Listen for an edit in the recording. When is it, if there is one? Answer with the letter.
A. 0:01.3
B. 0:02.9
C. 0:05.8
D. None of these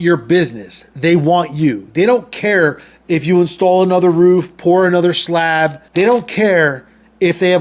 C